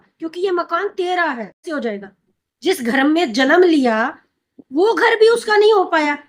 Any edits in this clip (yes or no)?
yes